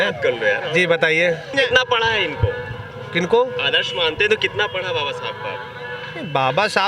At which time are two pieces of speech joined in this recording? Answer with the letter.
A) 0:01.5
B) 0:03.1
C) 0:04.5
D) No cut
A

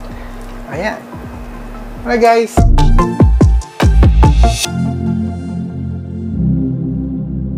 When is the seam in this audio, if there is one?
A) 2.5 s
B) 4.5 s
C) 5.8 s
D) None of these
A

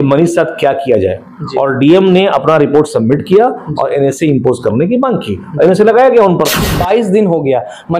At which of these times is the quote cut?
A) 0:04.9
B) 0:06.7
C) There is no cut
B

